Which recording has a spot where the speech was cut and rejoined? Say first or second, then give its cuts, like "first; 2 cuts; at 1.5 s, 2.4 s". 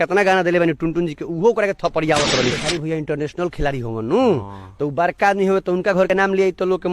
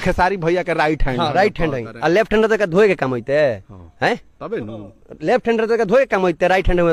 first; 1 cut; at 2.6 s